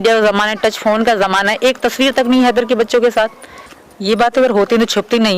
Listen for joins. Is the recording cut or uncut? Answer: cut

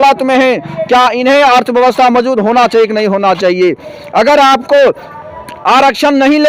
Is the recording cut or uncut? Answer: uncut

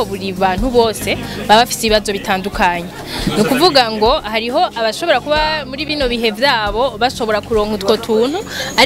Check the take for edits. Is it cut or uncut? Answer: uncut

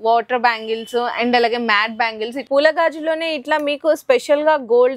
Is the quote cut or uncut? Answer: cut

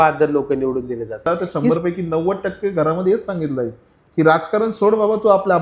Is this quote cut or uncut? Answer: cut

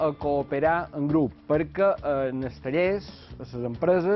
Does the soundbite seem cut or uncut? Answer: uncut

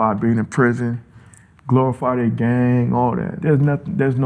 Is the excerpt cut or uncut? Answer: cut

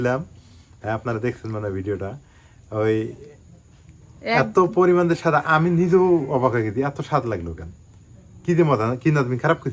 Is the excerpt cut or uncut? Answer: uncut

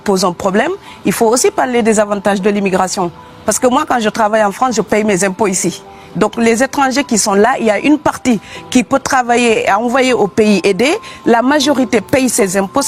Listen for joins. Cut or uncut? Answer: uncut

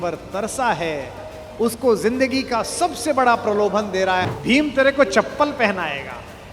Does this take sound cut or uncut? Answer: cut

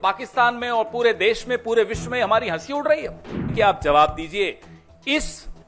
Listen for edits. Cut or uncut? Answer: cut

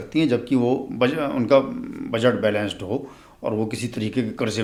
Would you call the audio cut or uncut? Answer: uncut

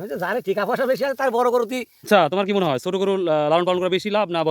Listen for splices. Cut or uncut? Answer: cut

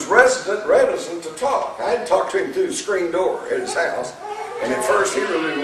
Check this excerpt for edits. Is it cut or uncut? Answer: cut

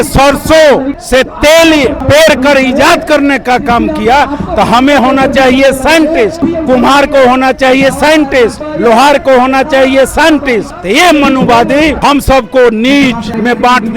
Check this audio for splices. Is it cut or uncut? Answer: uncut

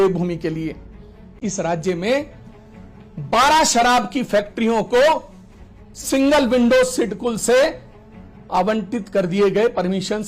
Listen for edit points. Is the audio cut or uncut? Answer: cut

